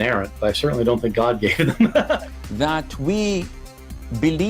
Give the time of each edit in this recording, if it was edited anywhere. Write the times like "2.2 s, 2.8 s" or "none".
1.1 s